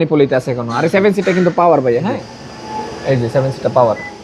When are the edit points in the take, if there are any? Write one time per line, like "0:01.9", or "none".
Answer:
0:02.3